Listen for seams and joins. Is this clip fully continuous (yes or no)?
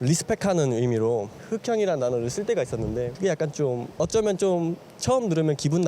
no